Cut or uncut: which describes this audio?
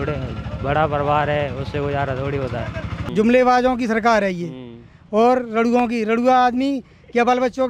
cut